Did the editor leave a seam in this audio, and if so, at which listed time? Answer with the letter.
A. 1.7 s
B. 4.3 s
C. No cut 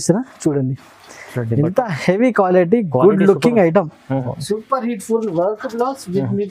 B